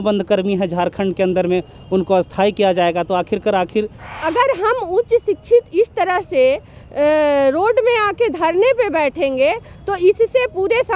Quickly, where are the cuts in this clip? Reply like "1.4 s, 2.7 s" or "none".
4.1 s